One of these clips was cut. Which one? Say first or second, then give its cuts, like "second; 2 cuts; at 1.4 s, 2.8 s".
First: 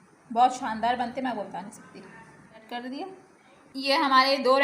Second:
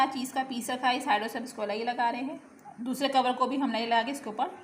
first; 1 cut; at 2.6 s